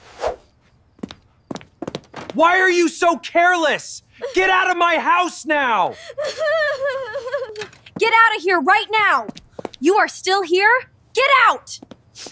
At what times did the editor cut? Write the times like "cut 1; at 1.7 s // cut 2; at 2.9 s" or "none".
none